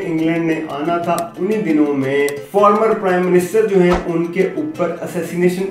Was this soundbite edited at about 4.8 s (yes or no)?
no